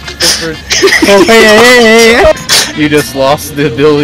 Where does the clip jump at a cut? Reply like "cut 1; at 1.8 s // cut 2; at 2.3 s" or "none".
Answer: cut 1; at 2.3 s